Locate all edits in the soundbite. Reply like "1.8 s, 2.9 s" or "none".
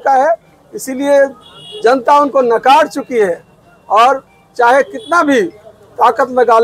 none